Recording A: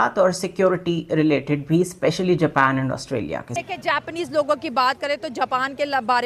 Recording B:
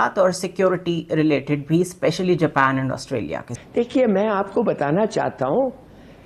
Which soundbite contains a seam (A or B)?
B